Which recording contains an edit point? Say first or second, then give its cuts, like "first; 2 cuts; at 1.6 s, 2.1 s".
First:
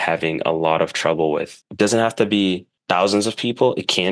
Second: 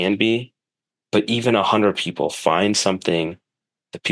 first; 2 cuts; at 1.6 s, 2.7 s